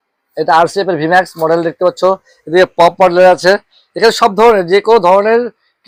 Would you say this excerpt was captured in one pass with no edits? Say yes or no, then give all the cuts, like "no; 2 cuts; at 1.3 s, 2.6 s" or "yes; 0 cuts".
yes; 0 cuts